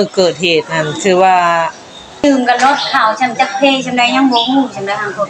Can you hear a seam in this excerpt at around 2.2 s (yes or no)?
yes